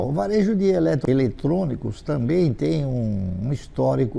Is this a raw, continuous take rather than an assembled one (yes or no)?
no